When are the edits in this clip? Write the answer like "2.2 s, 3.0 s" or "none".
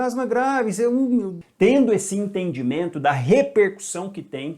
1.4 s